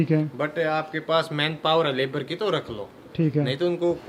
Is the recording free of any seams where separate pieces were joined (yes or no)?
yes